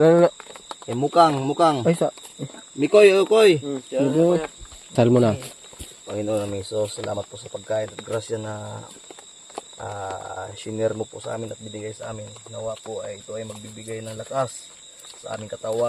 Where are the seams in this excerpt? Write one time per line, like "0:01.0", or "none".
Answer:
0:04.9